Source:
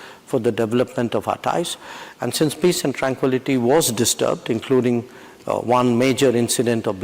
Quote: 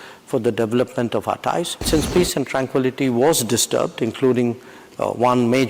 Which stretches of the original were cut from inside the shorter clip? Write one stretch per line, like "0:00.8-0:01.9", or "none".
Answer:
0:01.8-0:02.3